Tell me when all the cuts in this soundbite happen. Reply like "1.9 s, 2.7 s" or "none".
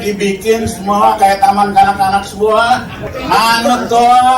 3.1 s